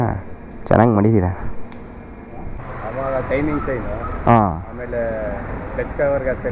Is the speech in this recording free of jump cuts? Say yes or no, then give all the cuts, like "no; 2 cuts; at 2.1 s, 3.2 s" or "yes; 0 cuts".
no; 1 cut; at 2.7 s